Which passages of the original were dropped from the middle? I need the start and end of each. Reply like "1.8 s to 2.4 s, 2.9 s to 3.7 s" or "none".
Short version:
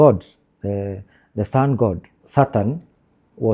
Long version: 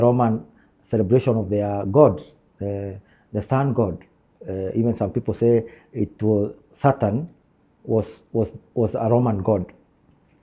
4.1 s to 6.6 s